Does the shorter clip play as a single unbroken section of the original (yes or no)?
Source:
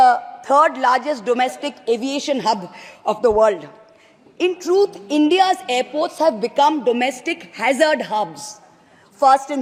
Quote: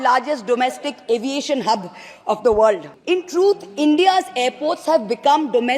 no